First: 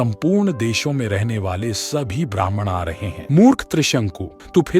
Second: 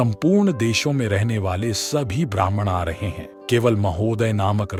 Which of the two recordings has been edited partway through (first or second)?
first